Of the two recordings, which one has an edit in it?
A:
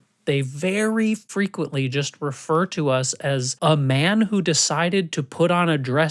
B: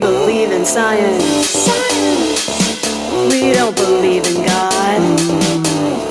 A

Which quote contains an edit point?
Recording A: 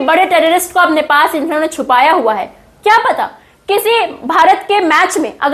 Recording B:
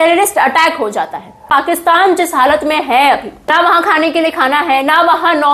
B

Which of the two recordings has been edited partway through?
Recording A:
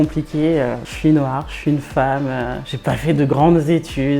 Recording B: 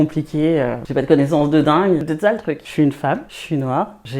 B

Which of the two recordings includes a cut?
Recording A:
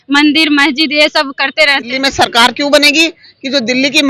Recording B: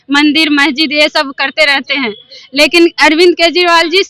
A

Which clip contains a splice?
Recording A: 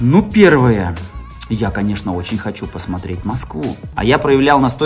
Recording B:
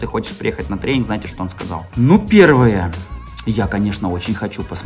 A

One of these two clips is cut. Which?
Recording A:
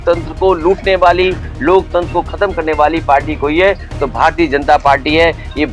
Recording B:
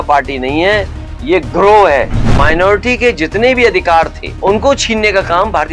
B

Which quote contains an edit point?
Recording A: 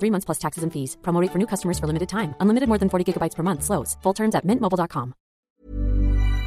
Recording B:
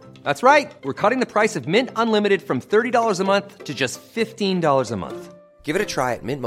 A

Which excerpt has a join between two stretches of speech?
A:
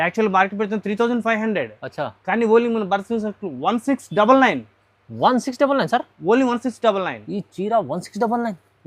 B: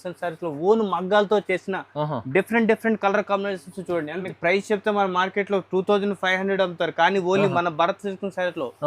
B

